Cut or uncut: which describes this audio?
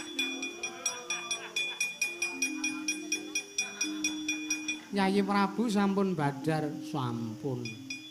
cut